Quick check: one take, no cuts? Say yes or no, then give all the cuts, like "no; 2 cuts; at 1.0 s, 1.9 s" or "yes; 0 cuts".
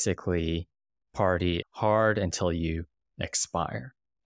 no; 1 cut; at 1.7 s